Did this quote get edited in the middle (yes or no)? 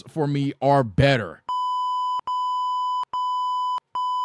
no